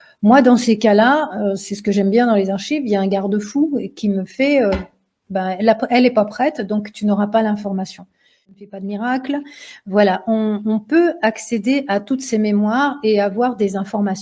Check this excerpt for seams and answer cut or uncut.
cut